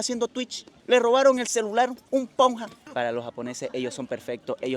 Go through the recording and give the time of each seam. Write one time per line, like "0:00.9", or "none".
0:02.7